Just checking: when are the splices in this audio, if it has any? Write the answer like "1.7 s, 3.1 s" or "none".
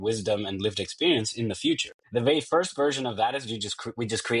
1.9 s